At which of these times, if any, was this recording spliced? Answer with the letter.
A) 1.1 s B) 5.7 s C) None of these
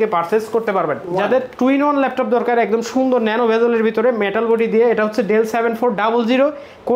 A